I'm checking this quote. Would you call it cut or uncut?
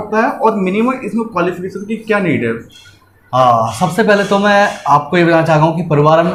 uncut